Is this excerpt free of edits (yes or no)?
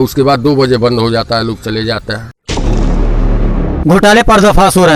no